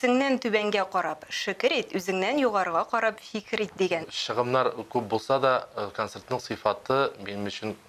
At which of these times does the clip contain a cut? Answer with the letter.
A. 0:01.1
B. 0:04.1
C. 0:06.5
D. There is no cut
B